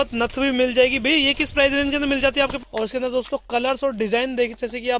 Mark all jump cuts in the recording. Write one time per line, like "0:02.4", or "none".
0:02.6